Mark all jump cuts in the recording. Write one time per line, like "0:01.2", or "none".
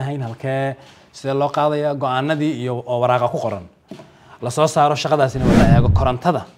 0:05.6

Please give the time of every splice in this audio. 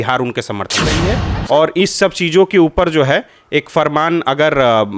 0:01.0

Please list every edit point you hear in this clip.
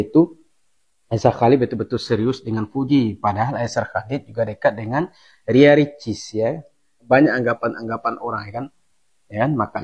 0:06.9

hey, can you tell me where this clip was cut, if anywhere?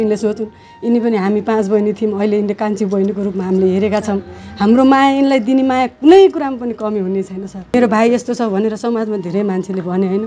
0:07.7

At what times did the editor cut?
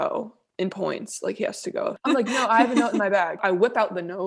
0:02.2
0:03.3

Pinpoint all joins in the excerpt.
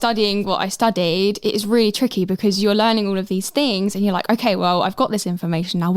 0:01.4

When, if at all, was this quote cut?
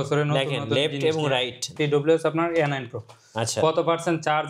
0:01.7

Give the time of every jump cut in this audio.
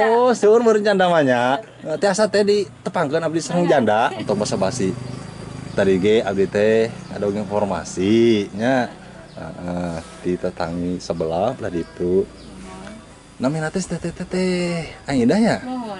0:04.2

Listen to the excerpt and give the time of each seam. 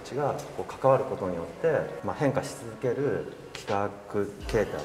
0:01.9

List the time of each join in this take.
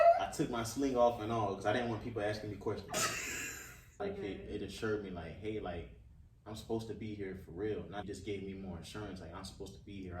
0:03.8
0:08.0

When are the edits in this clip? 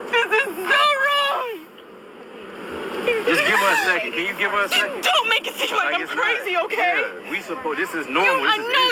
0:05.5

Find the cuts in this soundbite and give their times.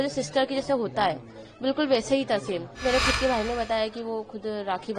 0:02.8

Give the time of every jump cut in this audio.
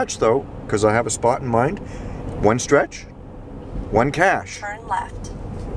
none

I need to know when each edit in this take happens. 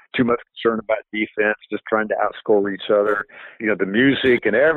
0:03.6

